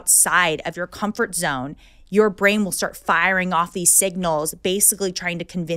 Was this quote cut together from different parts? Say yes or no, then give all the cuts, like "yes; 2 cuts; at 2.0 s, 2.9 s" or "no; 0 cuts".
no; 0 cuts